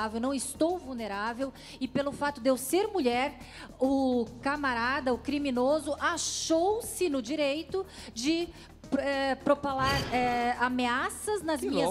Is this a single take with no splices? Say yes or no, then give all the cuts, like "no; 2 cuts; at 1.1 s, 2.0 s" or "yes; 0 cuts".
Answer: yes; 0 cuts